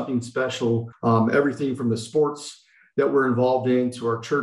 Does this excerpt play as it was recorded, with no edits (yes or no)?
no